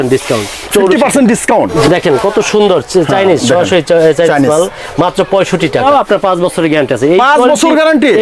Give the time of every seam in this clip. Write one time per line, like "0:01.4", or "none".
0:01.7
0:05.8